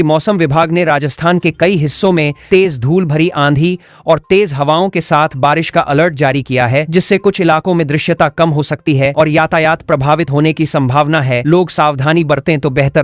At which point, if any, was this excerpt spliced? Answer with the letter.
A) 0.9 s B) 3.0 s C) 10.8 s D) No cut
D